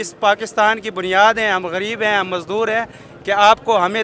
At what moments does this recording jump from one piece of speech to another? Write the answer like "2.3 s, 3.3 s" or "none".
none